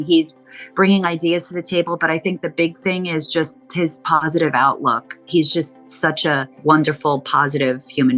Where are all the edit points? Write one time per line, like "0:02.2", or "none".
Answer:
none